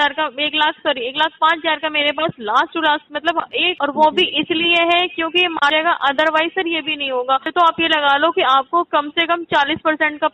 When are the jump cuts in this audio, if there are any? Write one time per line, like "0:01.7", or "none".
0:03.7
0:05.7
0:07.5